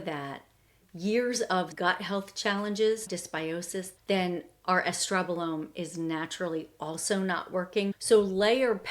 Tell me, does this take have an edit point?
yes; 2 cuts; at 3.1 s, 8.0 s

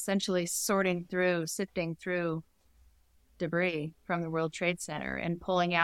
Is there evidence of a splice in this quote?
no; 0 cuts

